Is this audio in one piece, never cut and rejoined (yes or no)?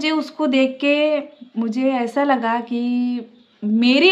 yes